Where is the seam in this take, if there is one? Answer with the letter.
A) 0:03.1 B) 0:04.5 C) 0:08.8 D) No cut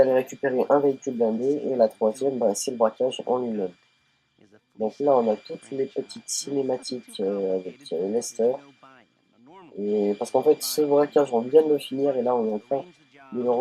A